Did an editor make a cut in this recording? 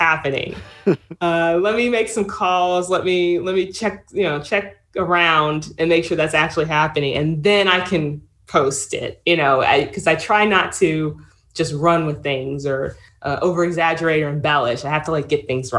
yes; 1 cut; at 13.1 s

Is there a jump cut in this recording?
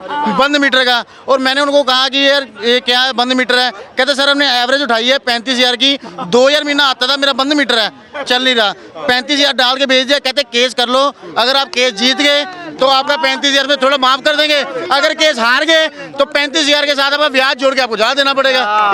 no; 0 cuts

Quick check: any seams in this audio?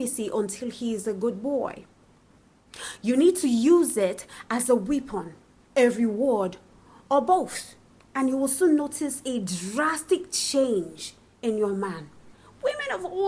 yes; 1 cut; at 12.3 s

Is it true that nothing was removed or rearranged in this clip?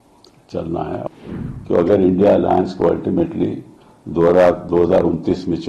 no; 1 cut; at 1.0 s

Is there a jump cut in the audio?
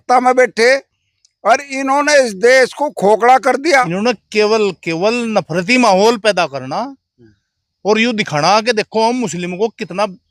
yes; 1 cut; at 3.9 s

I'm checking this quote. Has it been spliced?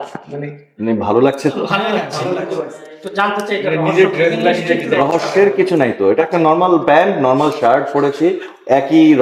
no; 0 cuts

